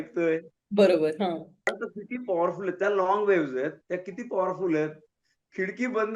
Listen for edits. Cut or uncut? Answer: cut